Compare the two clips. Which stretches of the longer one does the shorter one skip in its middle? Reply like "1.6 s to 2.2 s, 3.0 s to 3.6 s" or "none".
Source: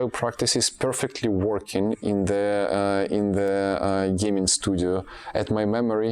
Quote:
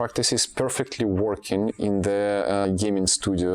2.9 s to 4.1 s